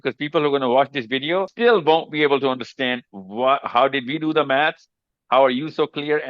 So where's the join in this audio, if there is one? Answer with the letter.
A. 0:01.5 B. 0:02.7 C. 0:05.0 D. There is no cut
A